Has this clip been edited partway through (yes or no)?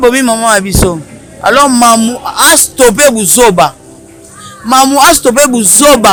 no